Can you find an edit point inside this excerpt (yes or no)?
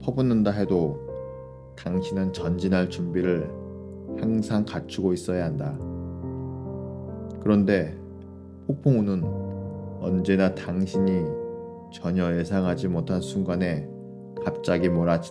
no